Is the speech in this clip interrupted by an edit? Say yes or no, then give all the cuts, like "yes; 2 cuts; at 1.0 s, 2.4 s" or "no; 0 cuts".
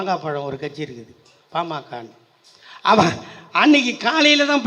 no; 0 cuts